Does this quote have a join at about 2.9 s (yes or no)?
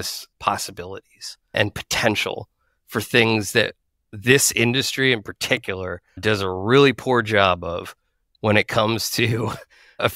no